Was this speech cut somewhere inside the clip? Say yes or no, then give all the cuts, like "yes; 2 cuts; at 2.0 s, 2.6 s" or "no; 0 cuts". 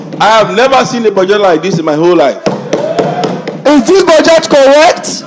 yes; 1 cut; at 3.5 s